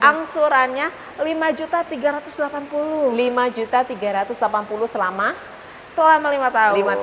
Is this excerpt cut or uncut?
uncut